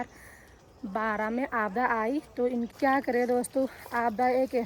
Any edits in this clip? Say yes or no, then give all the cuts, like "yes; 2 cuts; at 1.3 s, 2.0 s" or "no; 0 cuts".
yes; 1 cut; at 2.7 s